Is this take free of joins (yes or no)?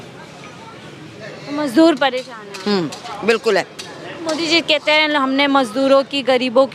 yes